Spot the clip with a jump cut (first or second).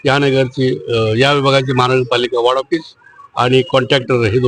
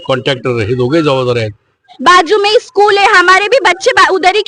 second